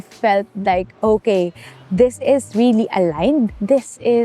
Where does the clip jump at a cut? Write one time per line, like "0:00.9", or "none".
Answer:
none